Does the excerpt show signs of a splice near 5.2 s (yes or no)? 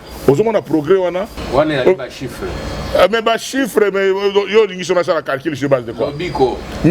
no